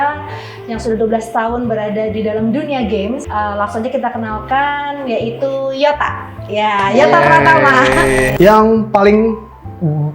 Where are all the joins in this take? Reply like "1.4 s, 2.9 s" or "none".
3.2 s, 8.3 s